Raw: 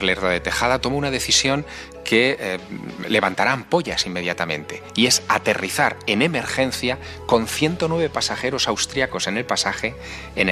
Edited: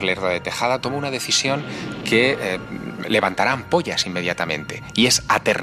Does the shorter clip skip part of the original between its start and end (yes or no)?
no